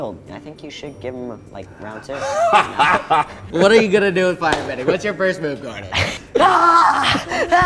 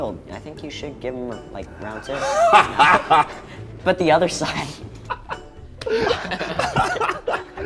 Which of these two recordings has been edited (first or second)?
first